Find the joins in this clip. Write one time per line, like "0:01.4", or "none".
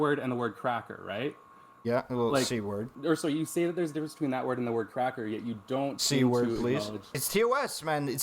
0:02.9
0:07.2

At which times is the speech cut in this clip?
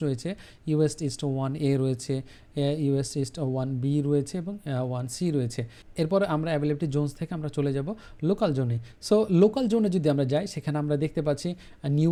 none

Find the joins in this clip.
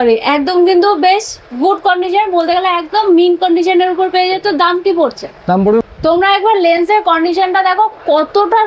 0:05.9

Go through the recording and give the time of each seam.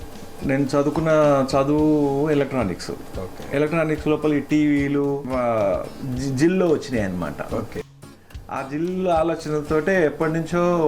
0:05.3

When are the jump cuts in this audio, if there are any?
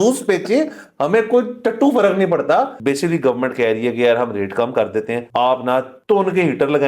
0:02.8
0:05.2
0:05.9

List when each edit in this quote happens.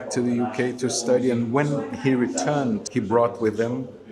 0:02.9

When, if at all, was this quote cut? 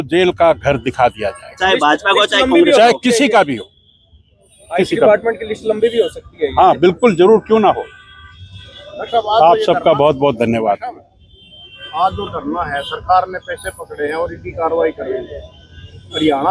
none

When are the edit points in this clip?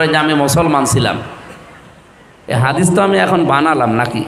none

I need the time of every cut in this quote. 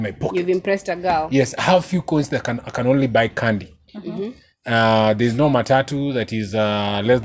none

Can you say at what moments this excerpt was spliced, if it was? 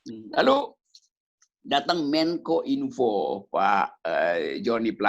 none

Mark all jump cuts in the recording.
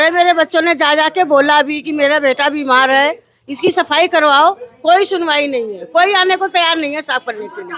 none

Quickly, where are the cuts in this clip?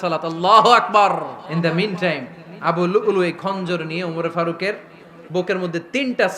0:01.4

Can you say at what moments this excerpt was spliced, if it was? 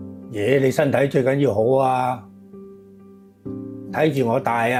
none

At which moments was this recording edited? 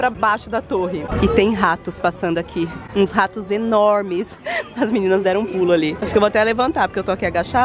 0:01.1

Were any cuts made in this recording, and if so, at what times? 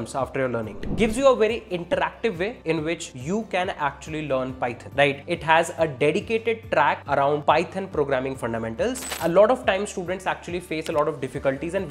0:00.8
0:02.8
0:05.1
0:07.3
0:09.1

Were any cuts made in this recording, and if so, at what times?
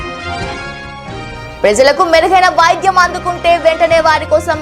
0:01.2

